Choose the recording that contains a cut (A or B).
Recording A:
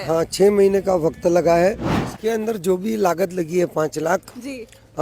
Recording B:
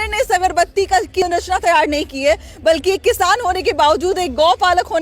B